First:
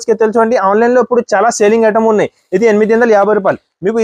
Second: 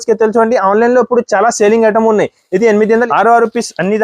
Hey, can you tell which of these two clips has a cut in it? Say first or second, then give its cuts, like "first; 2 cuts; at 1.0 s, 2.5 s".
second; 1 cut; at 3.1 s